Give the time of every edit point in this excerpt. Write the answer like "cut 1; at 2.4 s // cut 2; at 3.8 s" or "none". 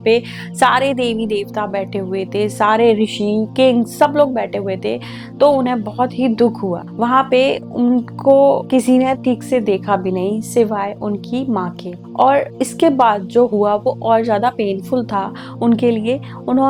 none